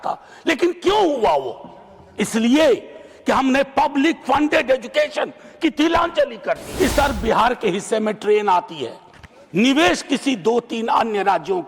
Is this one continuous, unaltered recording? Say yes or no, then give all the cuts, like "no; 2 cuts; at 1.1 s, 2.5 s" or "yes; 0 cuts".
no; 1 cut; at 6.7 s